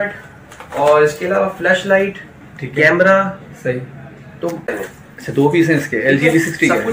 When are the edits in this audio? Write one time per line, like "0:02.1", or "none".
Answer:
0:04.7